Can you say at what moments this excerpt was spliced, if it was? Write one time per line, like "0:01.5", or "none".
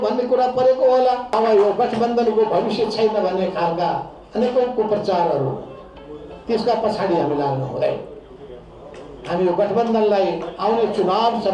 0:01.3